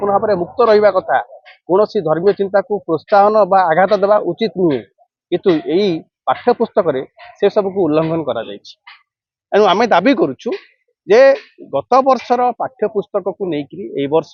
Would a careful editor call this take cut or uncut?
uncut